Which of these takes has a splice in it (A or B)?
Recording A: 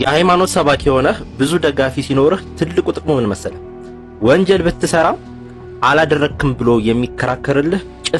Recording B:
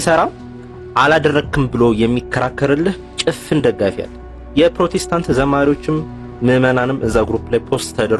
B